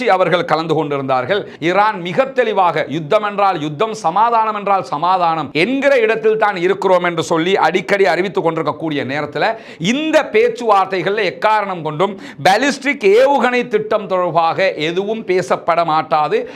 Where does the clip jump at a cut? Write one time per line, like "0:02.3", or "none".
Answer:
0:01.5